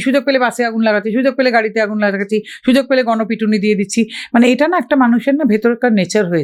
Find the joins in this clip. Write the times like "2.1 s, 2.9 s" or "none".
none